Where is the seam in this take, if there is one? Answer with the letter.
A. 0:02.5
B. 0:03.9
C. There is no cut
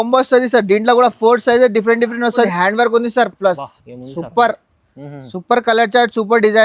A